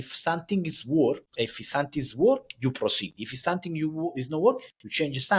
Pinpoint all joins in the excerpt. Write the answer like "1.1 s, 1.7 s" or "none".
1.3 s